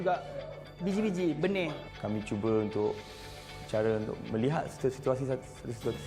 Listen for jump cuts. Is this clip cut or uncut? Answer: cut